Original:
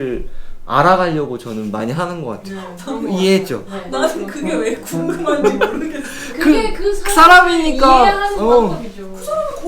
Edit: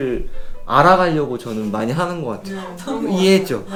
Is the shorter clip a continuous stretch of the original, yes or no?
yes